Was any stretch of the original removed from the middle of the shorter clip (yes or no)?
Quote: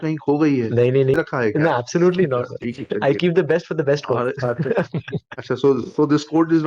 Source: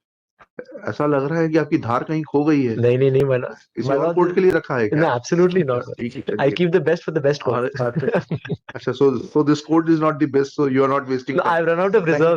yes